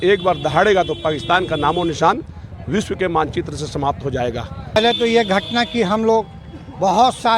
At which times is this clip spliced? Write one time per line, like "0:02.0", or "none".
0:04.8